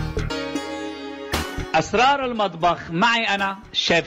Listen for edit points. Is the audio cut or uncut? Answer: cut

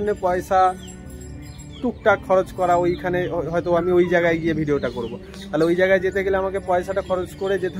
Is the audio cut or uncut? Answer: uncut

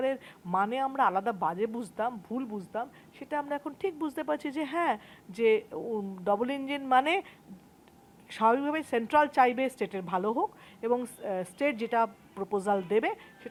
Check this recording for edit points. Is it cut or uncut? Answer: uncut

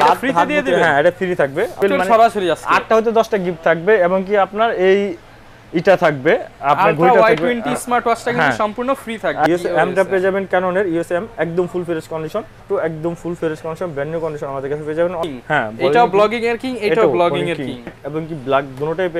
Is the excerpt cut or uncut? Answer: cut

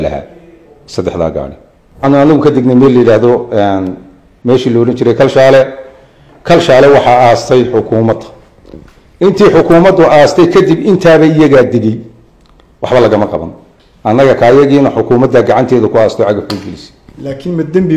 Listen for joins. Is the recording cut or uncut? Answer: cut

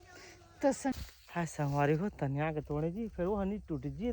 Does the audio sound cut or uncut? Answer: cut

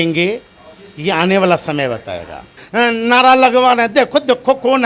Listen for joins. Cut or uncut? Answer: cut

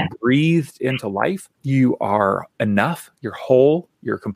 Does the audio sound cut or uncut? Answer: cut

